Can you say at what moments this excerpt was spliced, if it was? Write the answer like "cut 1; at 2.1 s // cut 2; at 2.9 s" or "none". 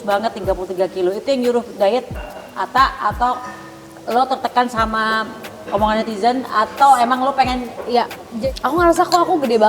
cut 1; at 8.3 s